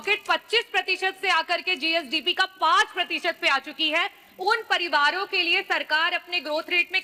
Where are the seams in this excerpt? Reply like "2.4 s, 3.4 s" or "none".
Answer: none